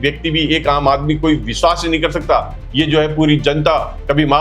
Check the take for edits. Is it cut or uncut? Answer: cut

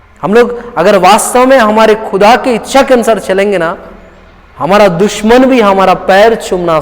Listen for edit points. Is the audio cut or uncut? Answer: uncut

